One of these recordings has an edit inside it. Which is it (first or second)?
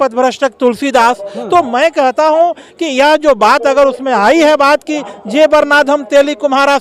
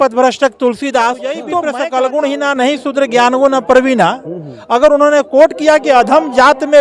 second